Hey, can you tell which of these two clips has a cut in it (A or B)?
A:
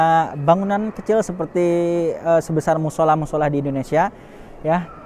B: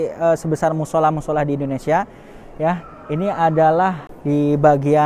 B